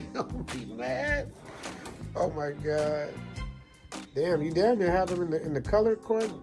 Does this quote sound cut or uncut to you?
cut